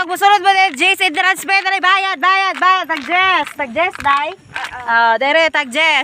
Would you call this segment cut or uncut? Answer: uncut